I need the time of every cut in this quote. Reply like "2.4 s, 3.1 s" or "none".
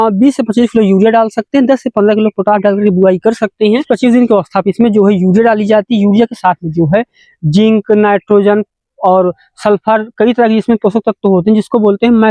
3.9 s